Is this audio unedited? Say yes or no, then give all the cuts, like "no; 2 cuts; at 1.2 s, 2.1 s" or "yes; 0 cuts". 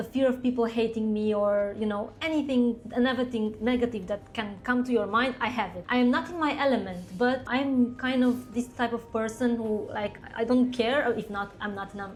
yes; 0 cuts